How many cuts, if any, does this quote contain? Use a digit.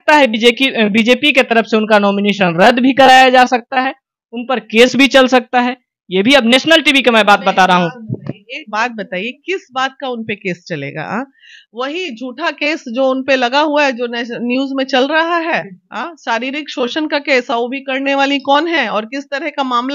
0